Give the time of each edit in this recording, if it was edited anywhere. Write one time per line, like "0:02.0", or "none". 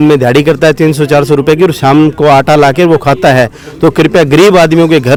none